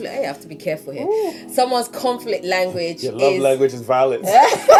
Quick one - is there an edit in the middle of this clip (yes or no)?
no